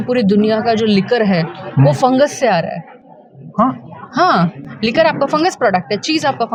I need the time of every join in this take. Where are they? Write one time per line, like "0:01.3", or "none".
none